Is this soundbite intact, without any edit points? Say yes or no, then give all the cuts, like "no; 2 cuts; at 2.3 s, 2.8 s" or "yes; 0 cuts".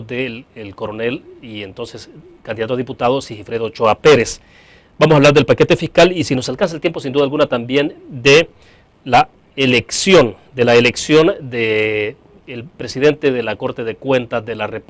yes; 0 cuts